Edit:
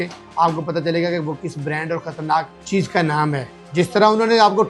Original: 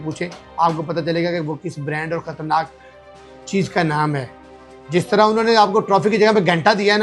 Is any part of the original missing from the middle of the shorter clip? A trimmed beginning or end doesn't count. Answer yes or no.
yes